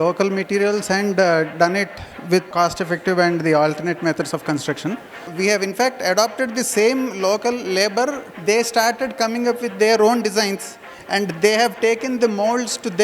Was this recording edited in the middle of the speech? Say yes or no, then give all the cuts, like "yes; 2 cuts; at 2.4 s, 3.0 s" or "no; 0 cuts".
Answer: yes; 2 cuts; at 5.2 s, 8.3 s